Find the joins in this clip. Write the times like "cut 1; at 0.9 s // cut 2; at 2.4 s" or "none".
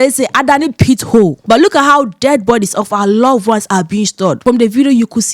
cut 1; at 1.4 s // cut 2; at 4.4 s